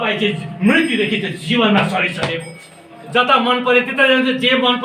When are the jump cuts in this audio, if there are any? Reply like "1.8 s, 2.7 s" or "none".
3.0 s